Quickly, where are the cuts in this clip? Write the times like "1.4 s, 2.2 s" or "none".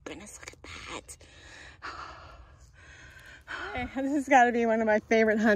3.9 s